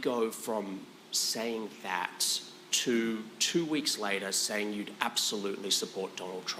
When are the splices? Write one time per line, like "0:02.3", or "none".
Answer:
none